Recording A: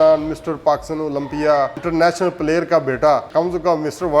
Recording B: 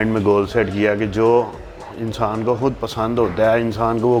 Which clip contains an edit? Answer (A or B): A